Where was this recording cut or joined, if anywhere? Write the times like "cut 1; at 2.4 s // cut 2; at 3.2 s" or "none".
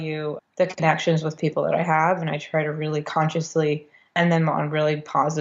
none